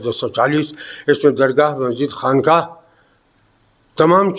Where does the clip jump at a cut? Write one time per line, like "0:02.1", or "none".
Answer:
none